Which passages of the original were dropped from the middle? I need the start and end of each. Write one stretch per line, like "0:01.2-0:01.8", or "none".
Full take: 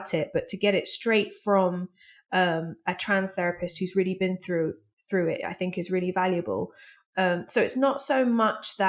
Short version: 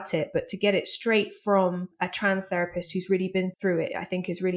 0:01.9-0:02.8
0:04.4-0:05.0